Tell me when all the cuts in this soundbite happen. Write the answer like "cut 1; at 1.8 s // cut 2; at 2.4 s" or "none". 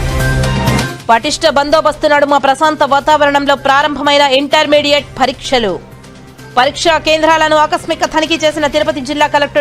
cut 1; at 0.9 s